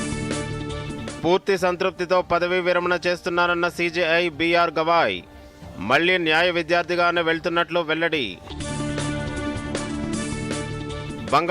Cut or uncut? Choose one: uncut